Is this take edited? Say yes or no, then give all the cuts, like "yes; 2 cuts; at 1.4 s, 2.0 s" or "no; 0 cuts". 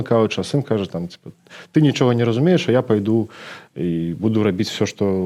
no; 0 cuts